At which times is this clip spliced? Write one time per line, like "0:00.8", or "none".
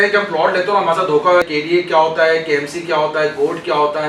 0:01.5